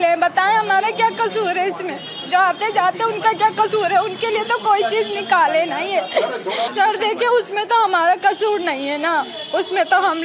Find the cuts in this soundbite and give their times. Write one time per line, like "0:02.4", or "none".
0:06.7

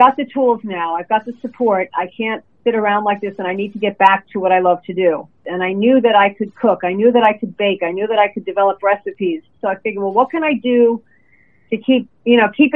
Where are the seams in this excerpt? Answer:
0:05.5
0:09.6

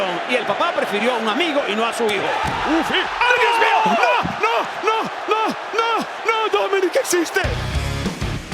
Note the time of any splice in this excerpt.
0:07.5

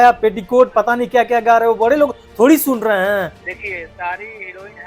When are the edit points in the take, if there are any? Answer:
0:03.4

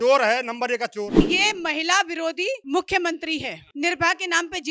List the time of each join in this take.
0:01.2
0:02.6
0:03.6

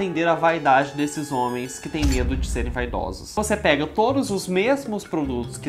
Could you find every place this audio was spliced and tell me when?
0:03.4

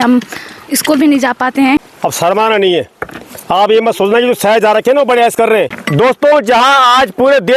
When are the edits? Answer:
0:01.9
0:05.8

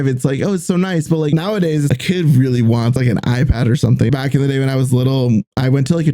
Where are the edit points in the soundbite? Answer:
0:01.3
0:02.9
0:04.1

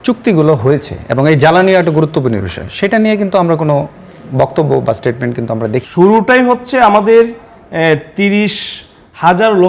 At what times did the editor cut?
0:05.8

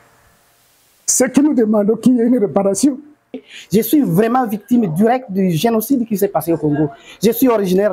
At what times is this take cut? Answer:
0:03.5

